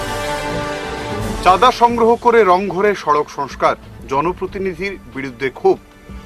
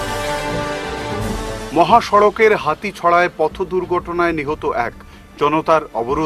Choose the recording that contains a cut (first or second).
first